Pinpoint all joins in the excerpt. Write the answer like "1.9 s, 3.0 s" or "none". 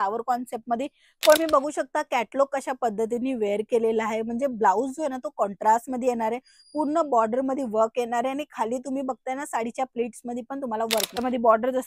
1.4 s, 11.2 s